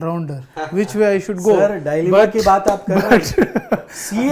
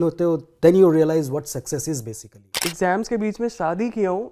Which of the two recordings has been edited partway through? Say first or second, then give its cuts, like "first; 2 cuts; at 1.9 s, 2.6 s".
second; 1 cut; at 2.7 s